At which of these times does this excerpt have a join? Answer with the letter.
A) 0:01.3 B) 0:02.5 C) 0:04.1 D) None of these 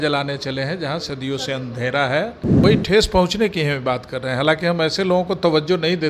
B